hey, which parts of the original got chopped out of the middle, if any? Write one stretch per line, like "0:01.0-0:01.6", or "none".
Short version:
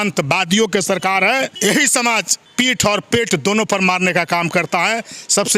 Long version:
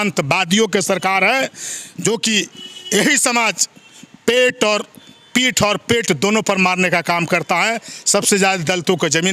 0:01.5-0:02.8
0:03.7-0:05.1

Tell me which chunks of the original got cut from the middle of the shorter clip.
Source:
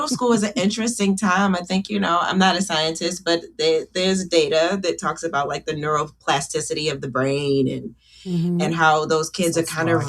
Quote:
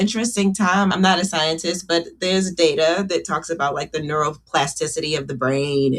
0:01.6-0:02.3
0:03.5-0:03.9

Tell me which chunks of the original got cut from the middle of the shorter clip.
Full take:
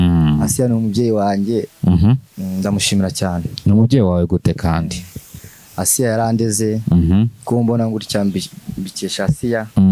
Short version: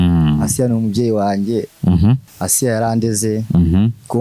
0:02.3-0:05.6

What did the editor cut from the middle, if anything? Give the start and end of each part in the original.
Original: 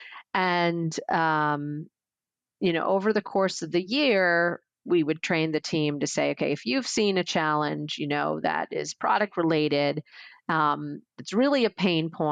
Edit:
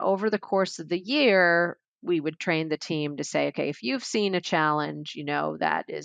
none

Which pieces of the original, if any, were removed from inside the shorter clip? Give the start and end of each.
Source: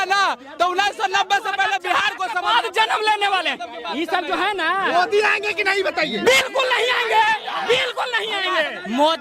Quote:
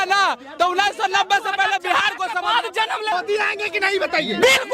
0:03.1-0:05.0

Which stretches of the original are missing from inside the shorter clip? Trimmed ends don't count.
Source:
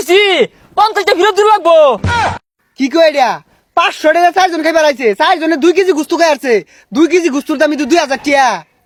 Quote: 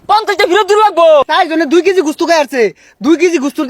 0:02.0-0:05.2

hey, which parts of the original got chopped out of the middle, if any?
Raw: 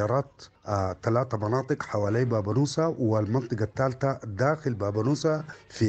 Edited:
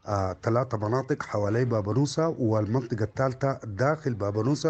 none

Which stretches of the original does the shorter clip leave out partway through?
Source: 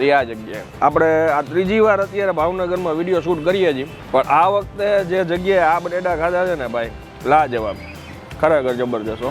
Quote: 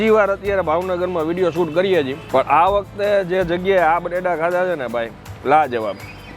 0:03.9-0:04.0

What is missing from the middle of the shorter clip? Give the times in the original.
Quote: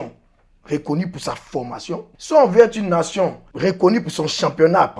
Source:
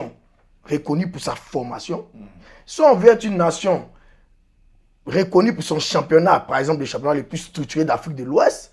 0:02.1-0:02.6
0:03.9-0:05.0

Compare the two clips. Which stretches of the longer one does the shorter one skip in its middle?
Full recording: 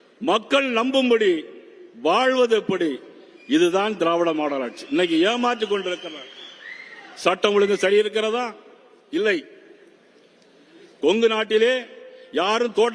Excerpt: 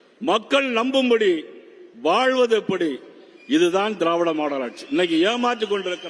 none

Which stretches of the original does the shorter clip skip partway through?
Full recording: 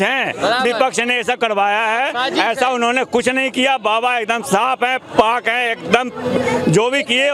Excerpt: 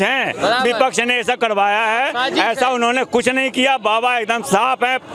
none

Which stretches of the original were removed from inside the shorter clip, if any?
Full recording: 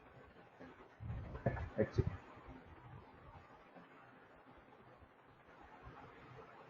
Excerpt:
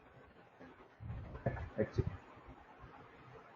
0:02.5-0:05.6

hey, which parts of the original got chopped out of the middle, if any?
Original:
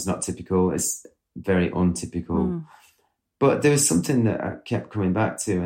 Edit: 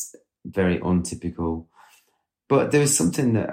none

